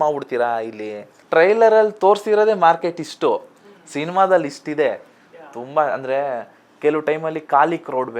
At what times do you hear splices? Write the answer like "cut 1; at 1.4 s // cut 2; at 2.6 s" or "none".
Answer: cut 1; at 1.2 s